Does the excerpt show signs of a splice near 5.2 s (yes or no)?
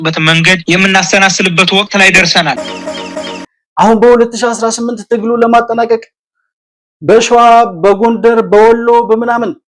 no